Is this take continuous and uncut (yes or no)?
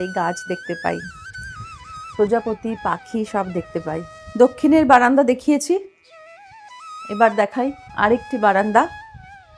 no